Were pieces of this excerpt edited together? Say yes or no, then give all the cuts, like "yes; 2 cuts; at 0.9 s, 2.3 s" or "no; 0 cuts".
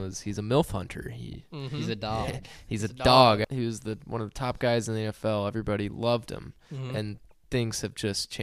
yes; 1 cut; at 3.4 s